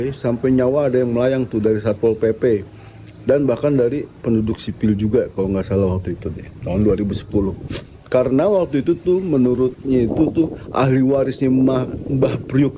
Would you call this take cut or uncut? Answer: uncut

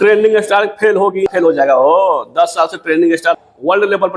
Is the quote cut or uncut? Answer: cut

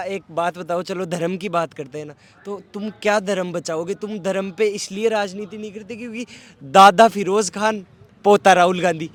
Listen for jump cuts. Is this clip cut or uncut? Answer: uncut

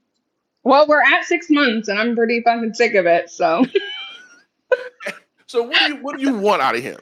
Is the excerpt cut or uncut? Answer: uncut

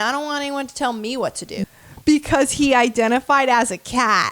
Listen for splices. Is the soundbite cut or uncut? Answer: cut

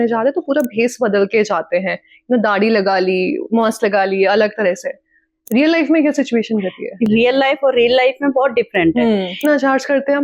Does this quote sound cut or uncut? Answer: cut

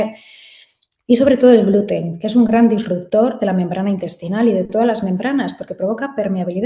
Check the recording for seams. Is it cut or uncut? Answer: uncut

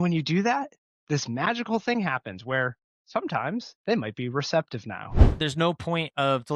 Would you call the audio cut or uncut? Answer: cut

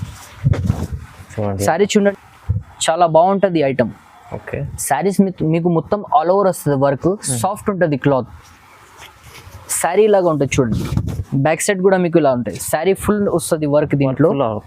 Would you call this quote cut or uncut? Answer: cut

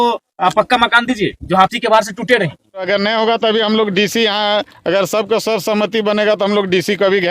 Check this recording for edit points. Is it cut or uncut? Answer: cut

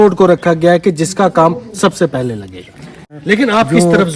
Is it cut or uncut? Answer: cut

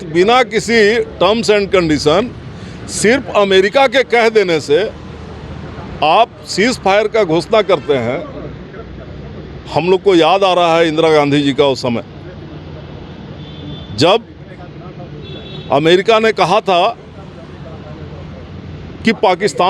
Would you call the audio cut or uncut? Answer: uncut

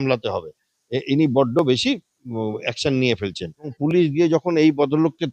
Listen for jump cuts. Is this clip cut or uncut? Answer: cut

